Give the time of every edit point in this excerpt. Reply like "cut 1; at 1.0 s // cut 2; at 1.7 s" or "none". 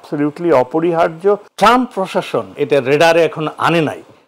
cut 1; at 1.5 s // cut 2; at 2.5 s